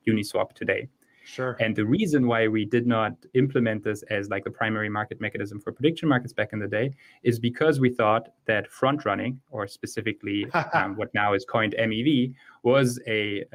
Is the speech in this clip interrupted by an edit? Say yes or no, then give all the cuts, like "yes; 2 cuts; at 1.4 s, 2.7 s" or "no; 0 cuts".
no; 0 cuts